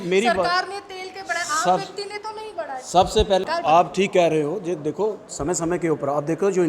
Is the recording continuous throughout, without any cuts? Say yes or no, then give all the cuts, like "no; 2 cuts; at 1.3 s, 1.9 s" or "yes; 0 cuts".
no; 1 cut; at 3.5 s